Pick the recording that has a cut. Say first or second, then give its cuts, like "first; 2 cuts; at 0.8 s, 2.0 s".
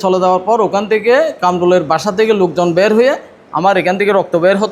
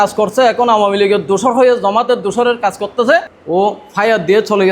second; 1 cut; at 3.4 s